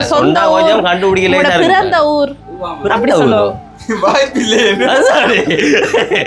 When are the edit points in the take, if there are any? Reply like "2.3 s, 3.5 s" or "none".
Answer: none